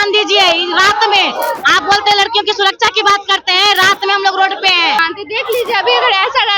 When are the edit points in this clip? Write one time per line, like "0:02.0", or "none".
0:05.0